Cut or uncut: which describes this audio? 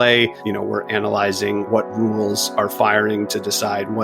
cut